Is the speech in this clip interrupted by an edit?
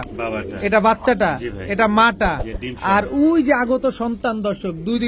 no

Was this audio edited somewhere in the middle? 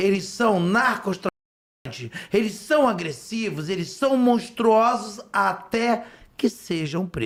no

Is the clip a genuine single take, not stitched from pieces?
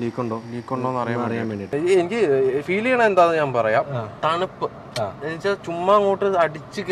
no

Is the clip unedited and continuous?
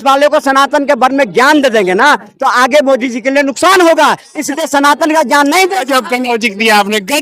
yes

